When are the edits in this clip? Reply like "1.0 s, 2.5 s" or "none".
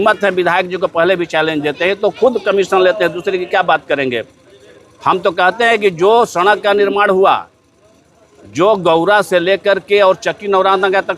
none